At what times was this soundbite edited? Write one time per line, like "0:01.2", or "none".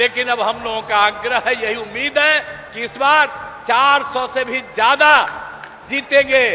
none